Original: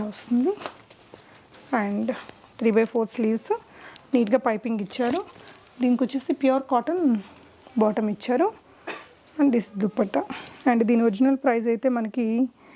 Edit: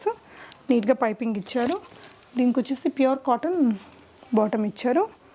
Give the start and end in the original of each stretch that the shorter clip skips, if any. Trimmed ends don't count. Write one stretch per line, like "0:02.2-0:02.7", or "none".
none